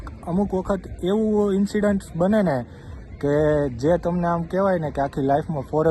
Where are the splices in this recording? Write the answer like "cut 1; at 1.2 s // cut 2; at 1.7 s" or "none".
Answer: none